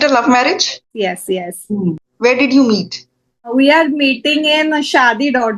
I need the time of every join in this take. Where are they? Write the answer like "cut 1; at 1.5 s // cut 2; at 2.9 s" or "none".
cut 1; at 0.9 s // cut 2; at 2.0 s // cut 3; at 3.5 s

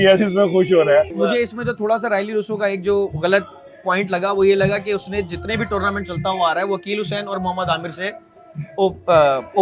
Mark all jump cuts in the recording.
cut 1; at 1.1 s

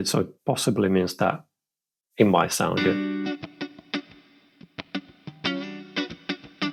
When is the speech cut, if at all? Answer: none

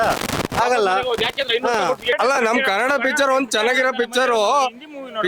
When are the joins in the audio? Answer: cut 1; at 2.2 s

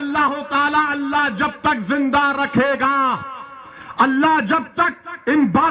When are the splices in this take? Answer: none

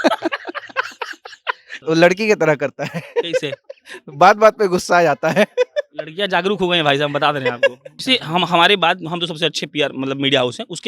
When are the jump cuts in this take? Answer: cut 1; at 1.8 s // cut 2; at 8.0 s

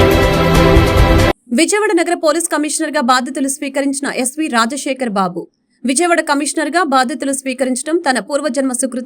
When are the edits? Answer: cut 1; at 1.3 s

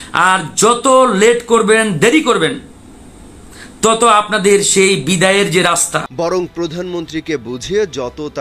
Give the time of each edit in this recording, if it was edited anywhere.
cut 1; at 6.1 s

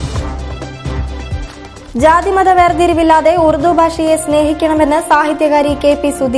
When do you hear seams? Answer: cut 1; at 1.4 s

